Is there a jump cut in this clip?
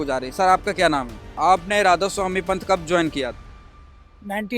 yes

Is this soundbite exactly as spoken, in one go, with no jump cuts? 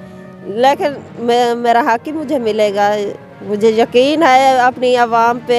yes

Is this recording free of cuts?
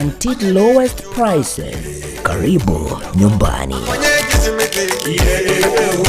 no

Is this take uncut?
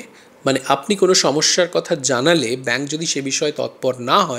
yes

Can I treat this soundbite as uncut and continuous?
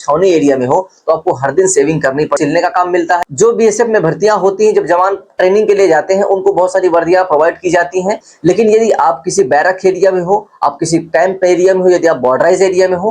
no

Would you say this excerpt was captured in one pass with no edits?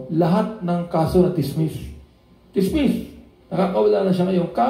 yes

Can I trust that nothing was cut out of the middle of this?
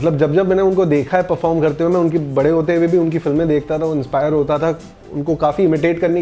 yes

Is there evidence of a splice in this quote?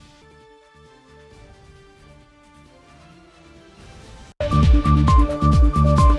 yes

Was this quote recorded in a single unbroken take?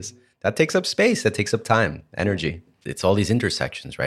yes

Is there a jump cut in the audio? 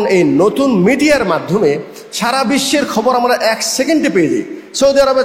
no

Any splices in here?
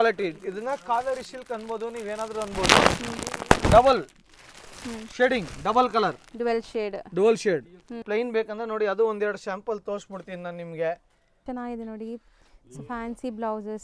yes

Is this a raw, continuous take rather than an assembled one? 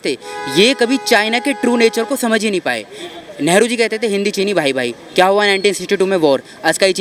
yes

